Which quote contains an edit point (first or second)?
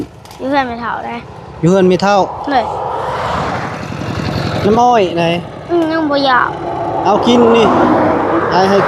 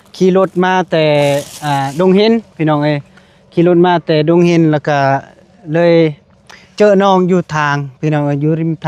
first